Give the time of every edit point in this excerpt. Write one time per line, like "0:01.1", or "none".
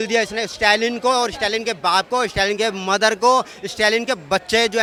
none